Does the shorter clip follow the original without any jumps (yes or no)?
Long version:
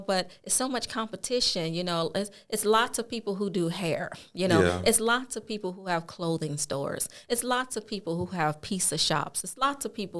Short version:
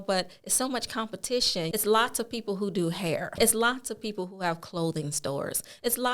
no